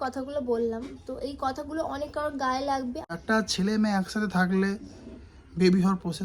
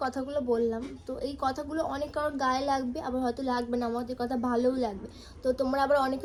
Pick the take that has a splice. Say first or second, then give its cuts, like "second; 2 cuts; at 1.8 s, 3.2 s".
first; 1 cut; at 3.0 s